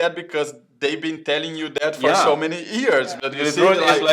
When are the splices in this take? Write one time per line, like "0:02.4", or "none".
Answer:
none